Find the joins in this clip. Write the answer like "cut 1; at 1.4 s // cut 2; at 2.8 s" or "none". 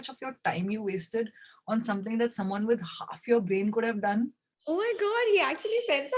none